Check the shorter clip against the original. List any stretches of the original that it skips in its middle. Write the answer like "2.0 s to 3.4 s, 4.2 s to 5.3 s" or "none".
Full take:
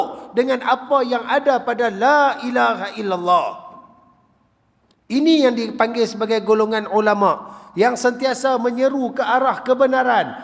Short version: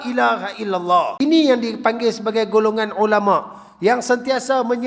3.5 s to 5.1 s